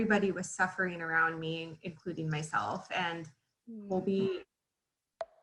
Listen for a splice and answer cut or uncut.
uncut